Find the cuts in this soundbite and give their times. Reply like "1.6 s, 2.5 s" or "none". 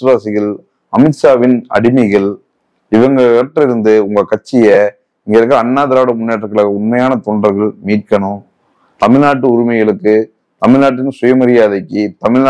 none